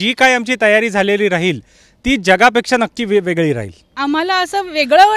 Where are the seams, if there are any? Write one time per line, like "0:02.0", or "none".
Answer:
0:03.9